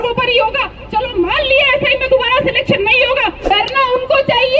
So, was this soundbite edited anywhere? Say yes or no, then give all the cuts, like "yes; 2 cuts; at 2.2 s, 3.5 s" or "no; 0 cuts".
yes; 1 cut; at 3.4 s